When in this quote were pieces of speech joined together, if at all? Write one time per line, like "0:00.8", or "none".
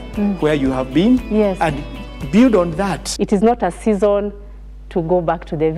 0:03.0